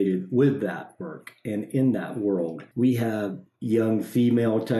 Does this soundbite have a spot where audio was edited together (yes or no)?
yes